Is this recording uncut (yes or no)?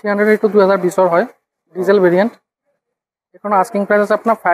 yes